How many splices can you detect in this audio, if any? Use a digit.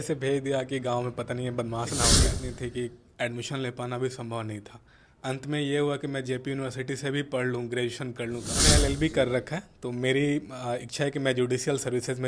2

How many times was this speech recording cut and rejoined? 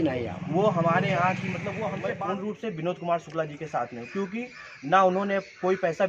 1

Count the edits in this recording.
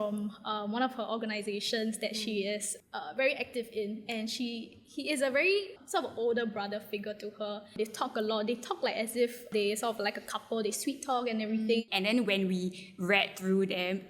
4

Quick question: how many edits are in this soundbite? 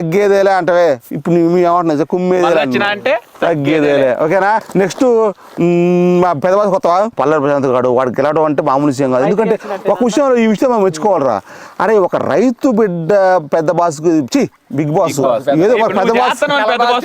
2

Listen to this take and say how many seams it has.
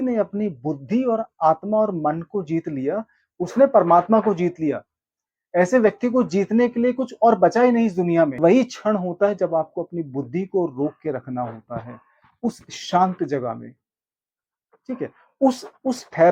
1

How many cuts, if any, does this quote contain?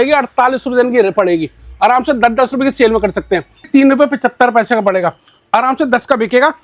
1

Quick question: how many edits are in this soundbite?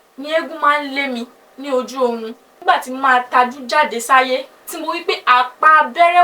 1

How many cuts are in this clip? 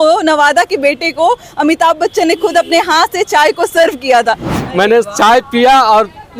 1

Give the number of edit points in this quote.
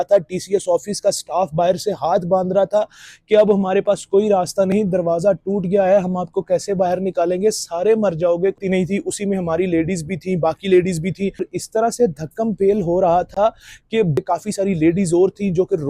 3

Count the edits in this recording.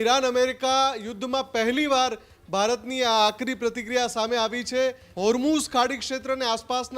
1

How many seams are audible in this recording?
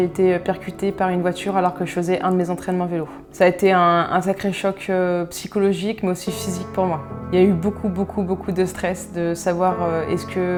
0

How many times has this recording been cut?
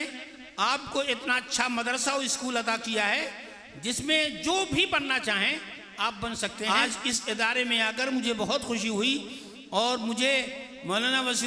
1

